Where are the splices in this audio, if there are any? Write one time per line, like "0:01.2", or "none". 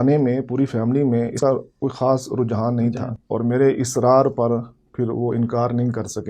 0:01.3
0:03.2

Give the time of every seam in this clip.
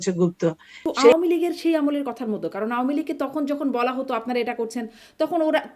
0:01.1

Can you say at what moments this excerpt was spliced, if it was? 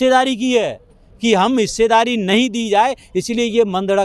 none

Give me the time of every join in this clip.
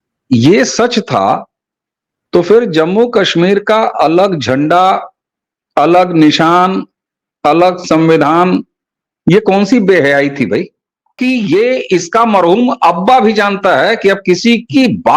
0:11.2

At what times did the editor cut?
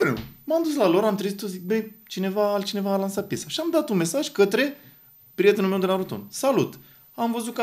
none

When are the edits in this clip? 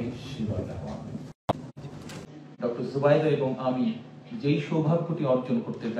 0:02.2

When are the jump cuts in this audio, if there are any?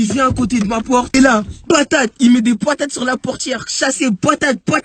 0:01.1

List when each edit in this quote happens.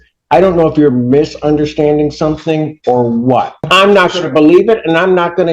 0:03.6

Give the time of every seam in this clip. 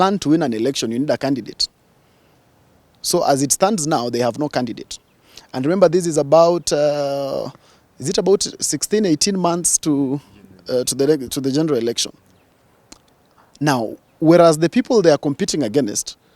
none

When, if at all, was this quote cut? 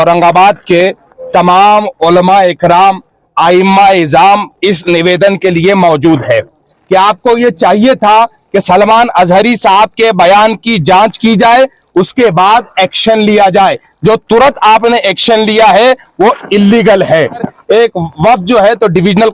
0:06.7
0:17.5

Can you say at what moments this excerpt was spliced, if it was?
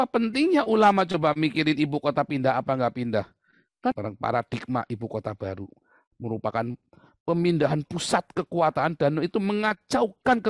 0:03.9

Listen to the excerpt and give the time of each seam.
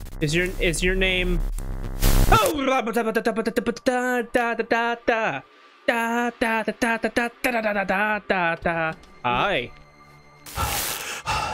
0:09.1

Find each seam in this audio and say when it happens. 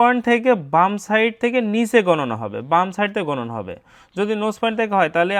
none

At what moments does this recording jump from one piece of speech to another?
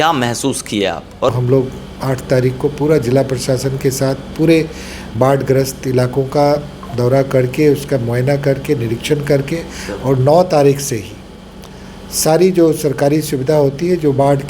0:01.4

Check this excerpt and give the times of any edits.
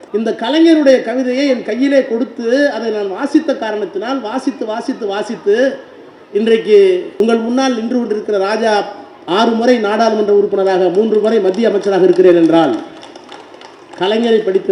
0:07.2

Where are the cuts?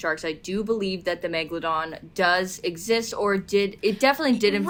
none

